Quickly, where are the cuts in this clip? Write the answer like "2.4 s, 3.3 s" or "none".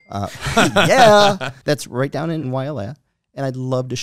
1.5 s, 2.5 s